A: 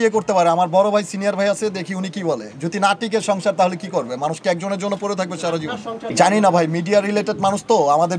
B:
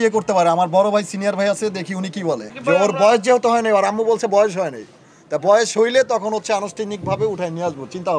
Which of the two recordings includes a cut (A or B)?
B